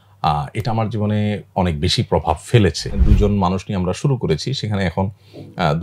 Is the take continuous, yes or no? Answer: no